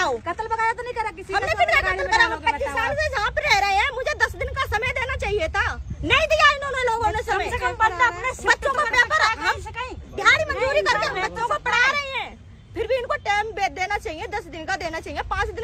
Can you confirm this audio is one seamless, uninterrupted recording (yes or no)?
yes